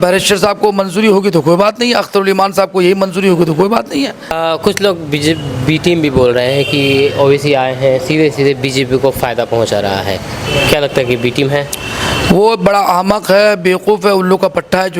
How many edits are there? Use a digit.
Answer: 1